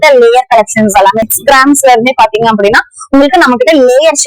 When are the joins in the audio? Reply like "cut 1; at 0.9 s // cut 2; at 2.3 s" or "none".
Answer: cut 1; at 1.2 s